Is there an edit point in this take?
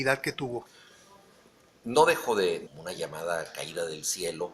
no; 0 cuts

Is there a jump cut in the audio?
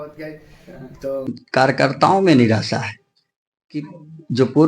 yes; 1 cut; at 1.3 s

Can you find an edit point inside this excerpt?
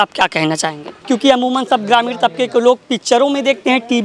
yes; 1 cut; at 0.9 s

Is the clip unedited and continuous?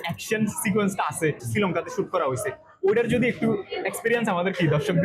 no; 1 cut; at 1.4 s

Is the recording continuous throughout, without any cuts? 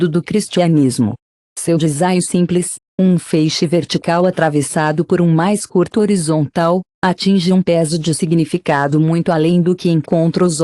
yes; 0 cuts

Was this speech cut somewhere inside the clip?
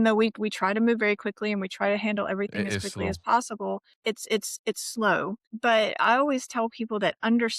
yes; 2 cuts; at 3.9 s, 5.4 s

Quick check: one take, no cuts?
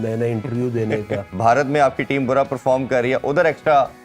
no; 1 cut; at 1.3 s

